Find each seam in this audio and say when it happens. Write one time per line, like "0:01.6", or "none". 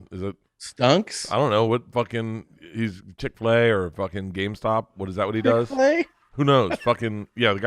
none